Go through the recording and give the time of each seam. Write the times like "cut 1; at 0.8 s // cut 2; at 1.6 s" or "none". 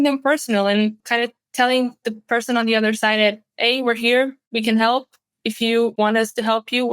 cut 1; at 1.0 s // cut 2; at 4.4 s // cut 3; at 5.9 s